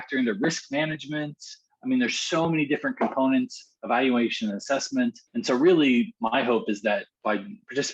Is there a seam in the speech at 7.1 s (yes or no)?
yes